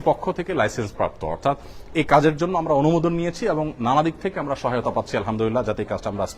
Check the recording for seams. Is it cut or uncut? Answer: uncut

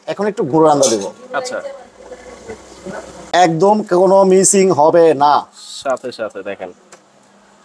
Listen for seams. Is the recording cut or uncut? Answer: cut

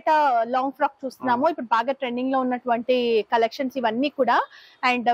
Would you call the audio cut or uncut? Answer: uncut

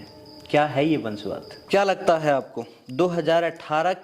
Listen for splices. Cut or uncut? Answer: cut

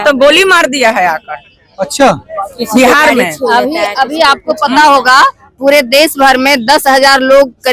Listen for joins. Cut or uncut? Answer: uncut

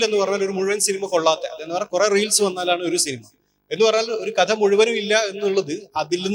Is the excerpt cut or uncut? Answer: uncut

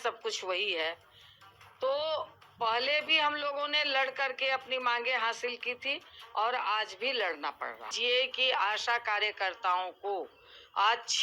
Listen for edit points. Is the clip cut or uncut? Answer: cut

